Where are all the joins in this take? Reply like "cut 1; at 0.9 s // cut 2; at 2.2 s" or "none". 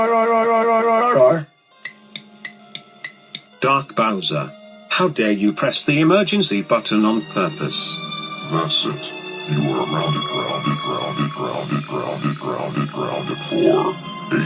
cut 1; at 1.0 s // cut 2; at 1.7 s